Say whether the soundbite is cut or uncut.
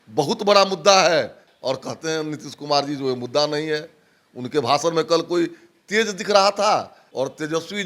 cut